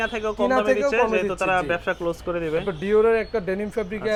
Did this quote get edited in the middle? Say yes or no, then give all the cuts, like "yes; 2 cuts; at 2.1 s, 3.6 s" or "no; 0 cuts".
no; 0 cuts